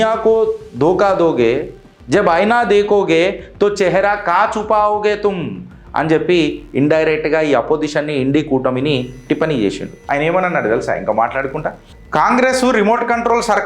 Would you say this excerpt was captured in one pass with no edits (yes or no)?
no